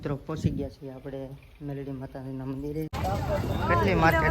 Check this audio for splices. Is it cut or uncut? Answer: cut